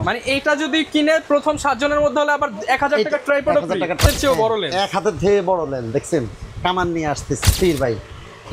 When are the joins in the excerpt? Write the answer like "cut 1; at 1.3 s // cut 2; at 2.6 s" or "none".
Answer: cut 1; at 4.0 s // cut 2; at 7.5 s